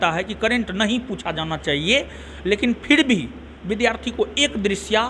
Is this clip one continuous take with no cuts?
yes; 0 cuts

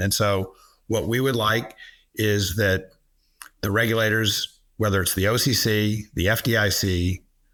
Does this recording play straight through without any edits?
yes; 0 cuts

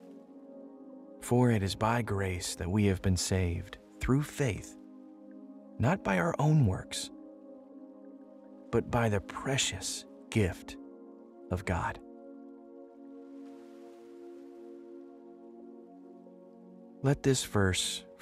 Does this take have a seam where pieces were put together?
yes; 2 cuts; at 12.0 s, 17.0 s

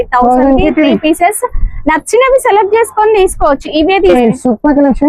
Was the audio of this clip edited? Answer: yes; 1 cut; at 4.1 s

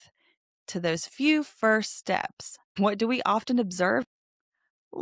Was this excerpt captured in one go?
no; 2 cuts; at 2.7 s, 4.1 s

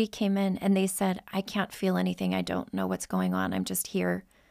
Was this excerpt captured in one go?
no; 1 cut; at 1.3 s

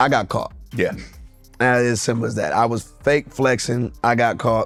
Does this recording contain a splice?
no; 0 cuts

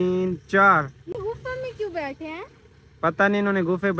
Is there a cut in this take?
no; 0 cuts

